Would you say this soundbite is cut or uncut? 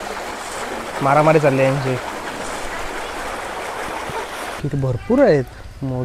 cut